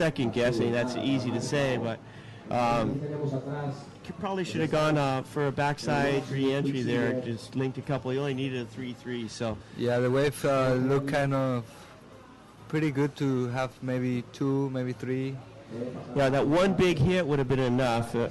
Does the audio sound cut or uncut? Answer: uncut